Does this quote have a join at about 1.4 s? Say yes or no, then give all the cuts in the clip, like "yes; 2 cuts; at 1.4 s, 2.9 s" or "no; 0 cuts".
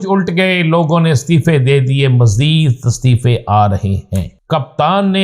no; 1 cut; at 4.3 s